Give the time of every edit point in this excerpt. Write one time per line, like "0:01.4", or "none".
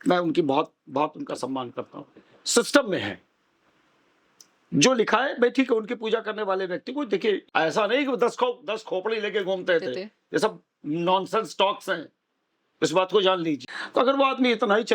0:07.4
0:13.7